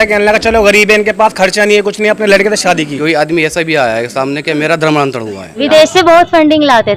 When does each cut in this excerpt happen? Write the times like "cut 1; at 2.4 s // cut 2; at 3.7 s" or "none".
cut 1; at 2.9 s // cut 2; at 5.6 s